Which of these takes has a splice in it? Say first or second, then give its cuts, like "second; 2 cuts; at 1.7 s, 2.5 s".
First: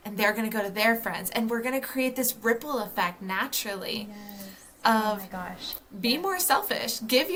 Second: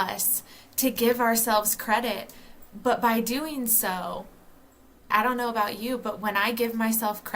second; 1 cut; at 5.1 s